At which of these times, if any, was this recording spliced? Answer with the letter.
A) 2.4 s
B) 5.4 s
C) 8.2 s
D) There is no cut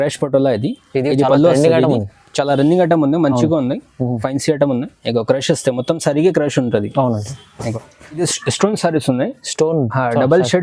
C